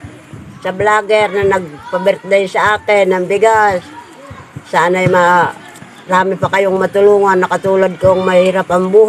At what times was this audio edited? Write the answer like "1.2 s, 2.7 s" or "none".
none